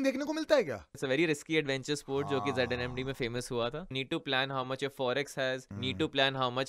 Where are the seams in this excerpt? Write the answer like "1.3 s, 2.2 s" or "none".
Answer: 0.9 s, 3.9 s